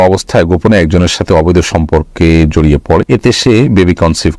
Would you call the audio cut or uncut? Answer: cut